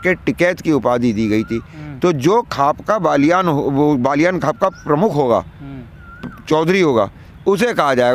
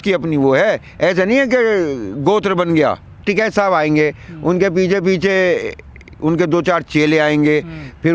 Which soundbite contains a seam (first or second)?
second